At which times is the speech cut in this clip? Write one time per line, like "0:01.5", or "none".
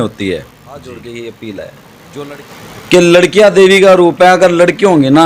0:01.0